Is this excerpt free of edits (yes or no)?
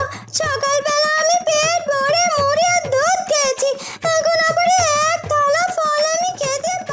yes